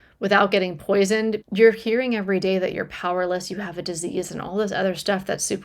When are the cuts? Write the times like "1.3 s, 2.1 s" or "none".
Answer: 1.4 s